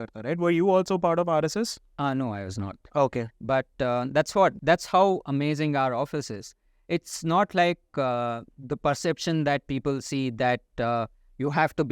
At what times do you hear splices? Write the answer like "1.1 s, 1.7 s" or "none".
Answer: 4.6 s